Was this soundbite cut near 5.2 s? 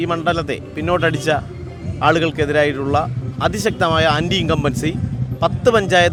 no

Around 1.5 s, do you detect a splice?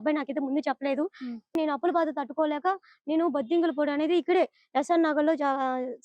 yes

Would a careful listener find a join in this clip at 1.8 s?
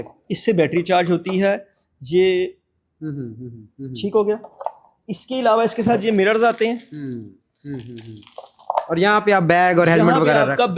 no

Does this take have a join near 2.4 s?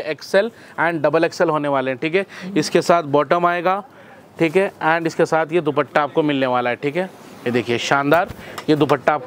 no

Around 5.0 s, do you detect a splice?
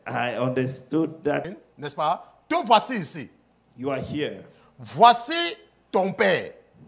no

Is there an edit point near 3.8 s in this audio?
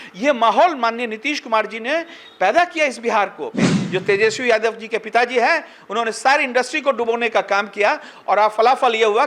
yes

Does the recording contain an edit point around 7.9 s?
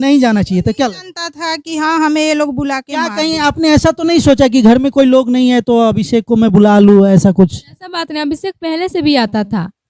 no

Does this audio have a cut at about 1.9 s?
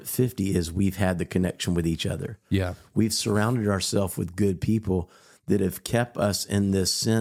no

